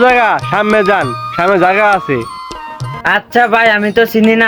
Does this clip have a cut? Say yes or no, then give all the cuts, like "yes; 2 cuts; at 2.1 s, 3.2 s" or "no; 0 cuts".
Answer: no; 0 cuts